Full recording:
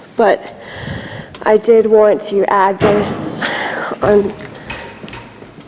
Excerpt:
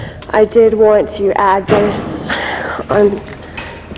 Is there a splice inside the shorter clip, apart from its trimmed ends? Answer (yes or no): no